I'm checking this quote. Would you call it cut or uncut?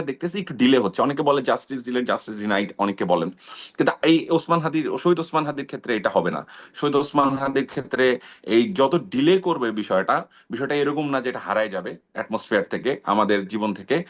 uncut